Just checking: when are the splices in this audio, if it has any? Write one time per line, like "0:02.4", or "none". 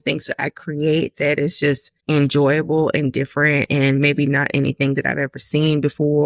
0:01.9